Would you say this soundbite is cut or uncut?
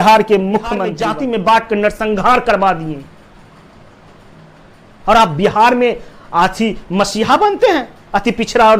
cut